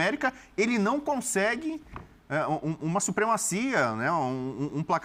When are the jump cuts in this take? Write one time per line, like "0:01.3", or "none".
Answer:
none